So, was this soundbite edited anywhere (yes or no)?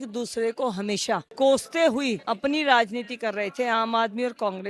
no